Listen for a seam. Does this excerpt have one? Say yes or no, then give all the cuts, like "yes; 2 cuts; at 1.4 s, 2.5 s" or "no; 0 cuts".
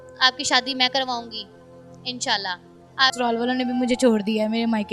yes; 1 cut; at 3.1 s